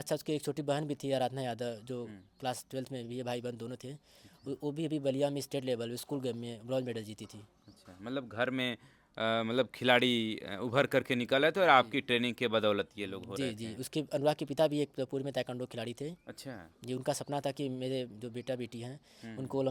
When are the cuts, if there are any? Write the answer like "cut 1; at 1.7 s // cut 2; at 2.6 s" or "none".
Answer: none